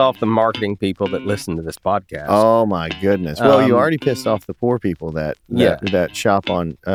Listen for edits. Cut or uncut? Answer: uncut